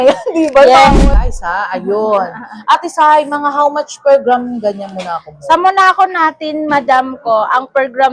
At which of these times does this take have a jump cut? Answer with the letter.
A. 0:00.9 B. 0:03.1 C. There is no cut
A